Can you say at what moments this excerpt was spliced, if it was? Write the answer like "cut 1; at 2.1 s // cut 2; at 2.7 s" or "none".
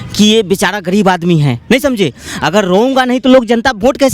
none